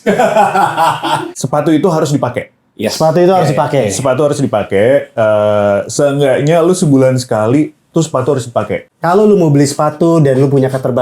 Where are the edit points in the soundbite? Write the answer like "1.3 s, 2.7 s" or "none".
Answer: 1.3 s, 8.8 s